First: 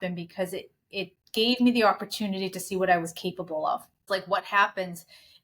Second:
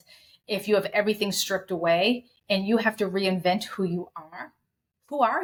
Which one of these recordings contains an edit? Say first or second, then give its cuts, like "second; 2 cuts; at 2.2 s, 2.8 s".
first; 1 cut; at 4.0 s